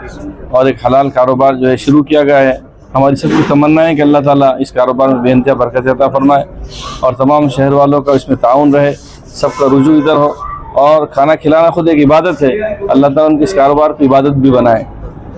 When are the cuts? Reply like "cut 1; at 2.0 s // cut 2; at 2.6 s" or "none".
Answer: none